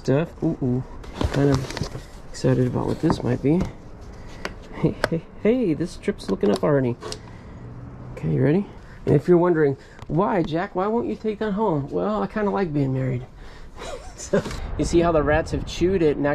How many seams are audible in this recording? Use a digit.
3